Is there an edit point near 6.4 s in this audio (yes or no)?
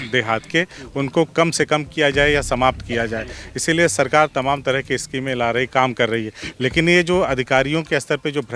no